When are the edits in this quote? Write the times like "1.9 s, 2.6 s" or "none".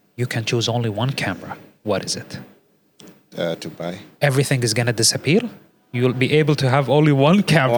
none